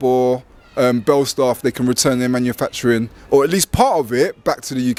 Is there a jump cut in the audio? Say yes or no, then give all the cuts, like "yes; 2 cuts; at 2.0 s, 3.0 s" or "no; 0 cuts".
no; 0 cuts